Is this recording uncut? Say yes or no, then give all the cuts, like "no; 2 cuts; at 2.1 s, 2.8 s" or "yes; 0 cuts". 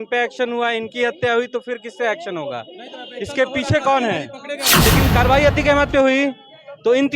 no; 1 cut; at 4.8 s